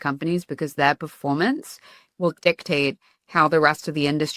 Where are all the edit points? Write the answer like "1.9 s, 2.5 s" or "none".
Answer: none